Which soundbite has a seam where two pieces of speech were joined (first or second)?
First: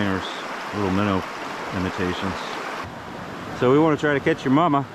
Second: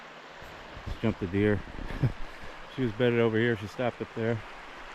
first